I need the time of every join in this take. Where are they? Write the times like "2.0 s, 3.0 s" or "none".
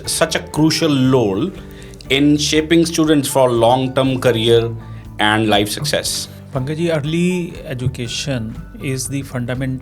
none